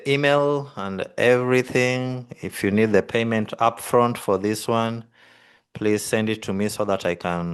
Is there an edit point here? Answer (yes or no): no